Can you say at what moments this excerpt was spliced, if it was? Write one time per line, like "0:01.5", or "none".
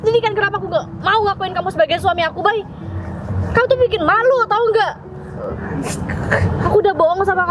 none